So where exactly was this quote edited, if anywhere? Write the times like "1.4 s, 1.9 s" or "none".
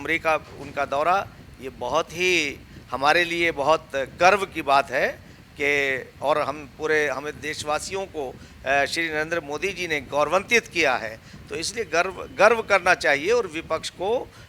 none

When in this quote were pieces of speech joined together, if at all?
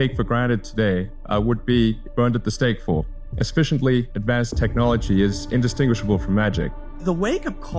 1.2 s, 2.0 s, 3.2 s, 4.1 s, 6.9 s

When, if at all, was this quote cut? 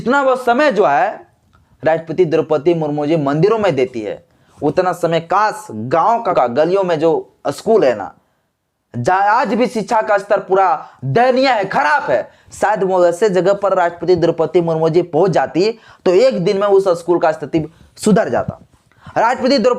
6.3 s

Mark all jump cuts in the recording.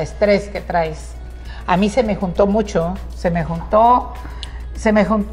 none

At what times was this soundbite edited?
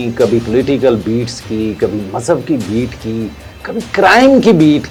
none

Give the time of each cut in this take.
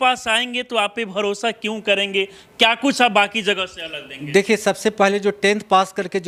none

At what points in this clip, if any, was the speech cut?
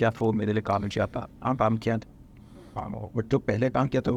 none

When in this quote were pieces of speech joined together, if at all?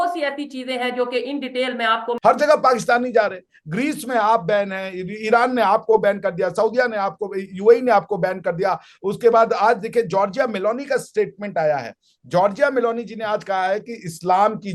2.1 s

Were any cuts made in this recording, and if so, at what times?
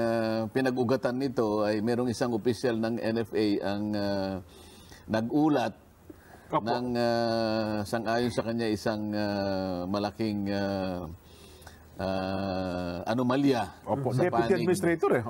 none

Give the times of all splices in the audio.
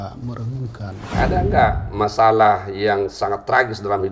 1.1 s

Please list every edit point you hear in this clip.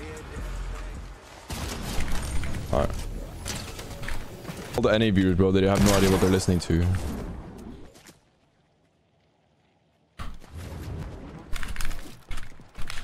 4.8 s, 11.0 s

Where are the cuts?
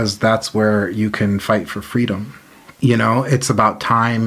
2.7 s

